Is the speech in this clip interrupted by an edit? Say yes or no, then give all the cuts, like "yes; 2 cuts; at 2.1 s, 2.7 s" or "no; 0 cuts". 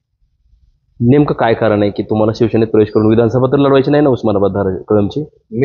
no; 0 cuts